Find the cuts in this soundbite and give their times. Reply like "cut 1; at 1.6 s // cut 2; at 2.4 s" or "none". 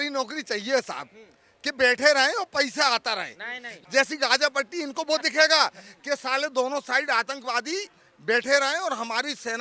cut 1; at 3.7 s